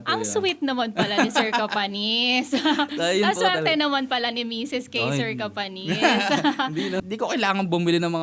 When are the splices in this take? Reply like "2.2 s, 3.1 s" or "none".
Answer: 7.0 s